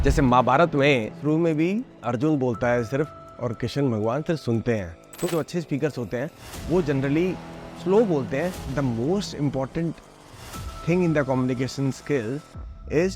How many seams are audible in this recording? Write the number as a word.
two